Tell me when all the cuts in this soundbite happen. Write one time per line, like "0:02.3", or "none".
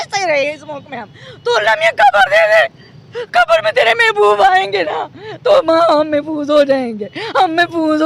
none